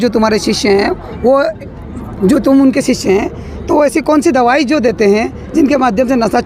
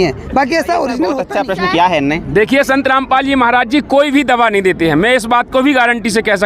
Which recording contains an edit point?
second; 1 cut; at 1.3 s

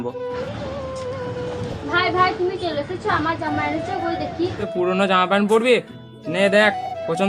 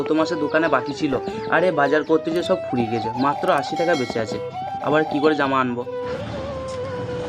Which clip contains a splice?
first; 1 cut; at 4.7 s

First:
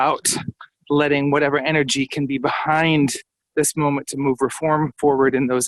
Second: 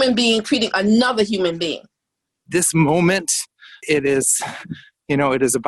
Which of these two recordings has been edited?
second; 1 cut; at 2.4 s

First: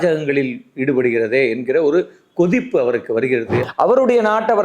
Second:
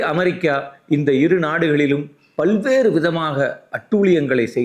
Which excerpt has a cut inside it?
first; 1 cut; at 3.7 s

